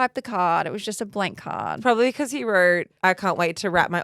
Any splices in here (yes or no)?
yes